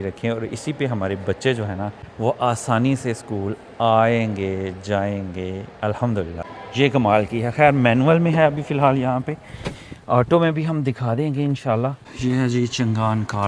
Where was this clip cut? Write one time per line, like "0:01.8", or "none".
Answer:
0:06.4
0:12.0